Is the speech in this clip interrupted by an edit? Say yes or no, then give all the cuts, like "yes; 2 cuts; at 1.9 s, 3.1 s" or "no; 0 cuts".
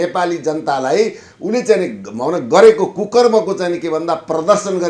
no; 0 cuts